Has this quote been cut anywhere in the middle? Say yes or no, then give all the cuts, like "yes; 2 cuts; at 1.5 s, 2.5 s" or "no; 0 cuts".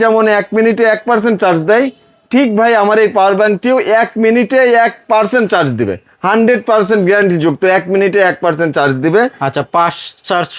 no; 0 cuts